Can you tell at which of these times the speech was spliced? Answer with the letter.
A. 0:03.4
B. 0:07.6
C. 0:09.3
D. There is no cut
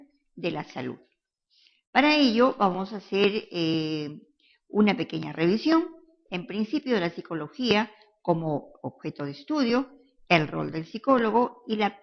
D